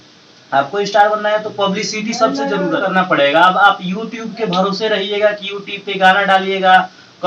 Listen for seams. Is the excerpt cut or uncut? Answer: cut